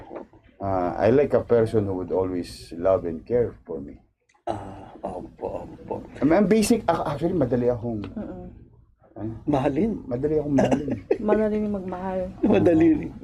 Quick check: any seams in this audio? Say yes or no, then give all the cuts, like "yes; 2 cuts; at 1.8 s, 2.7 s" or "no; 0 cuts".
no; 0 cuts